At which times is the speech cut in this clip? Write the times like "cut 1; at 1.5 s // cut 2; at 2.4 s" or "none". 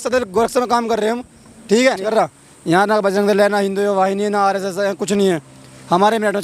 cut 1; at 2.0 s